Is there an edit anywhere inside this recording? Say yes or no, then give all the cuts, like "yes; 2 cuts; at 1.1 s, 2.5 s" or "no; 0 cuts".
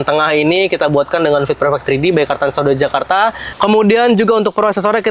yes; 1 cut; at 3.5 s